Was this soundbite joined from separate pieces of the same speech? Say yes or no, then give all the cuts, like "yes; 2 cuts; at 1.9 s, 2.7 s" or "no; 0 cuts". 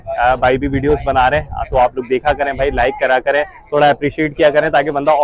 no; 0 cuts